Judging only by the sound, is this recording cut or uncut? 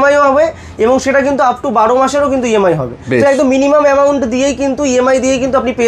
uncut